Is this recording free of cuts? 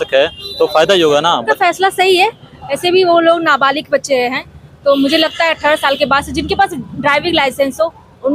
no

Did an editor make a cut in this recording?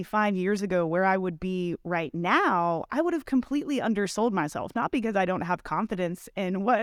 no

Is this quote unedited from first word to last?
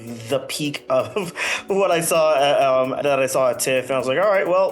no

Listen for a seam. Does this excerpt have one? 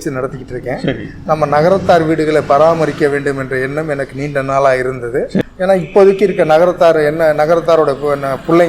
yes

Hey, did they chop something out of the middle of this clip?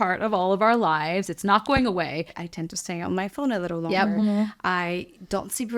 yes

